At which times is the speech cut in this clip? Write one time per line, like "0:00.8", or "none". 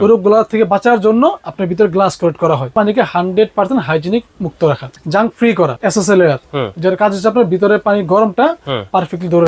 0:02.7
0:04.9
0:05.8